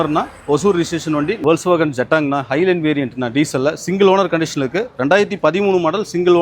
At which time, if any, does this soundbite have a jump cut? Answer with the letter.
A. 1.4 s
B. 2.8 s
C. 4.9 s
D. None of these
A